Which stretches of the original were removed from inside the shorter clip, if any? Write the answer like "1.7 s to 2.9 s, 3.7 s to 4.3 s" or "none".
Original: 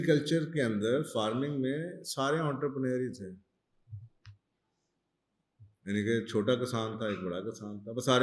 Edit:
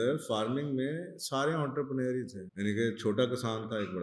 3.3 s to 5.7 s